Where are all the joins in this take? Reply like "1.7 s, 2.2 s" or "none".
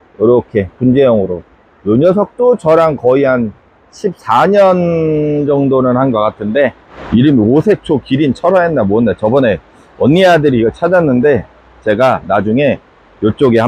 none